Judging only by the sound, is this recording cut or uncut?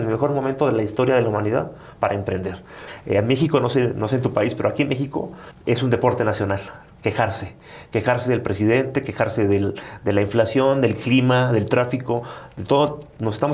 cut